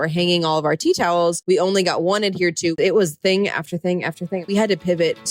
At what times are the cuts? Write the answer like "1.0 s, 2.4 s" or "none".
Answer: 1.4 s, 2.8 s, 4.5 s